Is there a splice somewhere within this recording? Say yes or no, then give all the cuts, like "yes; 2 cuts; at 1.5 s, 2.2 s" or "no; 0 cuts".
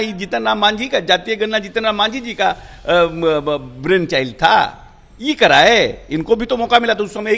no; 0 cuts